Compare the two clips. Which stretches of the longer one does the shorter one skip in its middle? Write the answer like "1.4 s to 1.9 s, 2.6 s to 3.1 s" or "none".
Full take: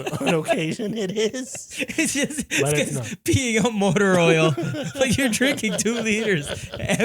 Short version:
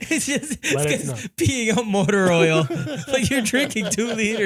none